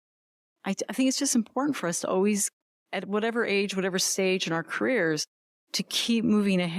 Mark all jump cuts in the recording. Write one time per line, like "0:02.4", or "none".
none